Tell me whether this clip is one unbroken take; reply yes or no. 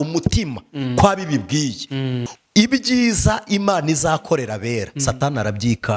no